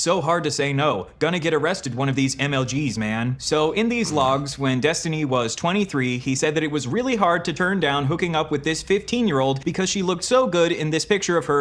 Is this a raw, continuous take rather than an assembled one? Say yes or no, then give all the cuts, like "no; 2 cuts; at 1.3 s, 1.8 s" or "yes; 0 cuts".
yes; 0 cuts